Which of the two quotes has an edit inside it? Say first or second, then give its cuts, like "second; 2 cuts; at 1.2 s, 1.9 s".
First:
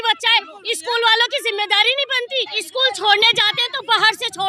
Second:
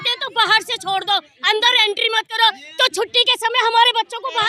first; 1 cut; at 2.6 s